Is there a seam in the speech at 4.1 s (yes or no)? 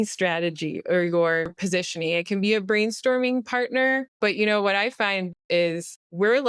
yes